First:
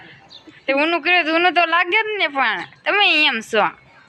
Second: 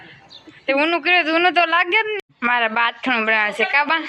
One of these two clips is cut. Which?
second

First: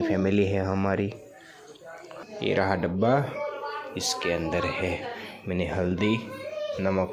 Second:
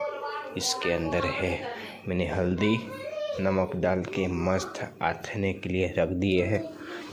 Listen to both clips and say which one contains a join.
first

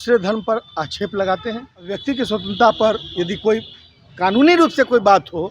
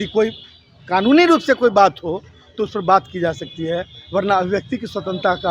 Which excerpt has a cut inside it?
first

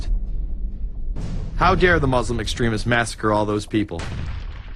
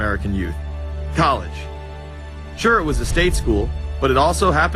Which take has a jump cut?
first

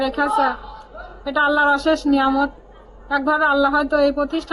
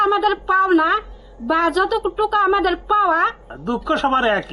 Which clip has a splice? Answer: second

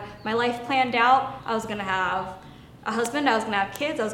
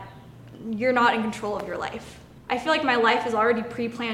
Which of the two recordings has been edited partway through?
second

